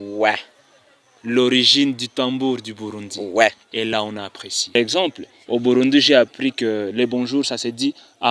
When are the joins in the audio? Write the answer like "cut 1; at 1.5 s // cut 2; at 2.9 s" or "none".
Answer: cut 1; at 4.7 s